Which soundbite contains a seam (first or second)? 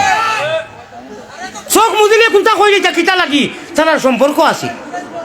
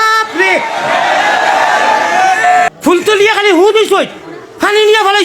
second